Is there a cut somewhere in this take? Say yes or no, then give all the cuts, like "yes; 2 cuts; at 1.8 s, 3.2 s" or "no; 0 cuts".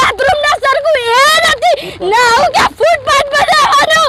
no; 0 cuts